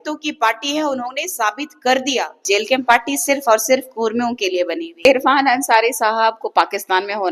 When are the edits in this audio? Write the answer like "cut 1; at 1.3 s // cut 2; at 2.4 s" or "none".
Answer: cut 1; at 2.4 s // cut 2; at 5.0 s